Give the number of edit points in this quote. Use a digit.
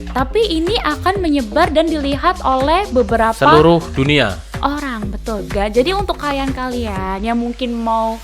1